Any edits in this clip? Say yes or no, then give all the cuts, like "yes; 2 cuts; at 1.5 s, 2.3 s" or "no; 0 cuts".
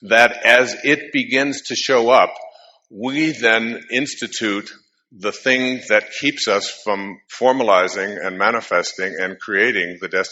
no; 0 cuts